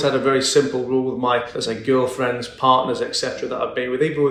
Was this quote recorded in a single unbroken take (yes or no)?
yes